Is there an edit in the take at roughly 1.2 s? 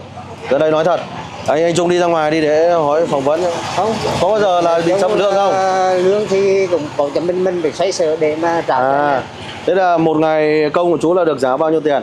no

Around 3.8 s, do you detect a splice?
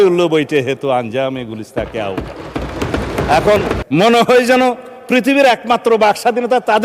yes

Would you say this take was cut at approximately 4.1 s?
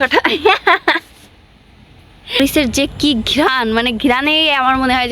no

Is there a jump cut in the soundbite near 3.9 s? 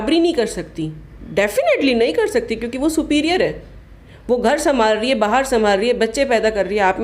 no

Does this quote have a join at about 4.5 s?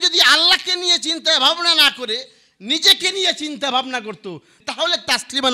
yes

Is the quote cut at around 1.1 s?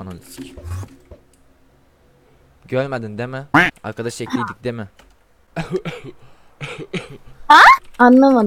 no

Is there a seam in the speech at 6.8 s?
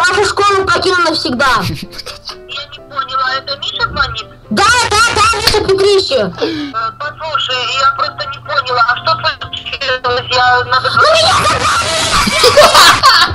yes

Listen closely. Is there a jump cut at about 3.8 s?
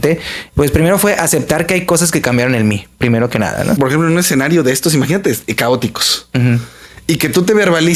yes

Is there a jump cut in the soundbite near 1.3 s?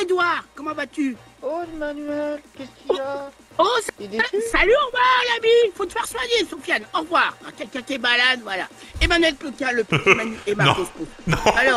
yes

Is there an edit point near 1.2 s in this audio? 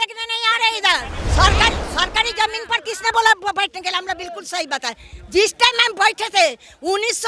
yes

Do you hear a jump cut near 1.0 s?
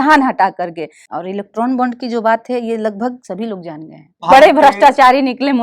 yes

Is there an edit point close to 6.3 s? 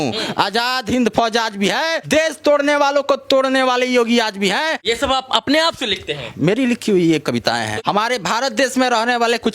no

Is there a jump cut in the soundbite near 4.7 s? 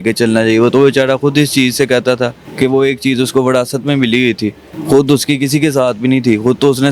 yes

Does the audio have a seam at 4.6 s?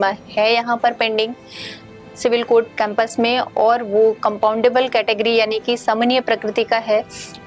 no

